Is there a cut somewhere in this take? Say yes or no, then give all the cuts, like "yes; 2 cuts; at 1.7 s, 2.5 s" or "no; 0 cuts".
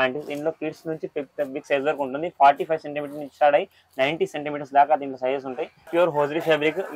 yes; 1 cut; at 5.8 s